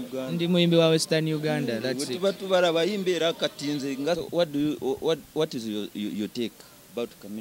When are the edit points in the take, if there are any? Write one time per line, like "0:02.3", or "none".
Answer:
0:04.2

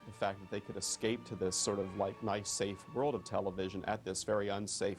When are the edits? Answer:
none

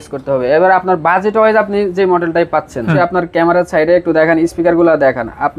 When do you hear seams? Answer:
0:02.9

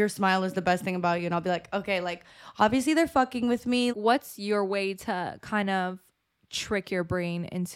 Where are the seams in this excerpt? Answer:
0:03.9

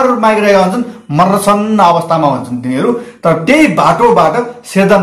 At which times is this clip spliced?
none

